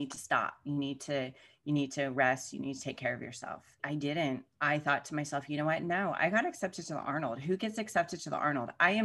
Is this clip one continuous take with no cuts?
no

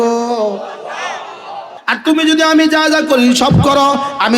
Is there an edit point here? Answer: yes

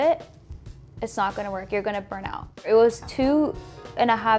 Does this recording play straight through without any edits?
no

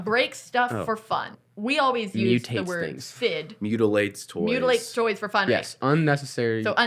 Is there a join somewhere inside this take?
yes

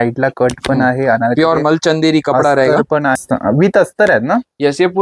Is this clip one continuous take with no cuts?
no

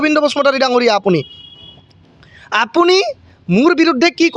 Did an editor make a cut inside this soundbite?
no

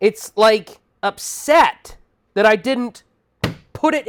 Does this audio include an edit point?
no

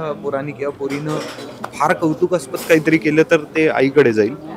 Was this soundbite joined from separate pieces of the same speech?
no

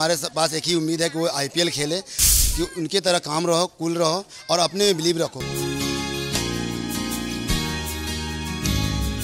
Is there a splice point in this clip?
yes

